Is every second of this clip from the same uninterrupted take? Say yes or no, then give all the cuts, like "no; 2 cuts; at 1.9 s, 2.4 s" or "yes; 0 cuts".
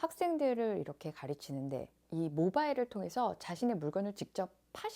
no; 1 cut; at 2.0 s